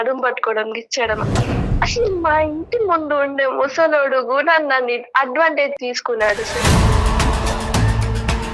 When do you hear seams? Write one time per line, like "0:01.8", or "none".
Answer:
0:01.7
0:05.8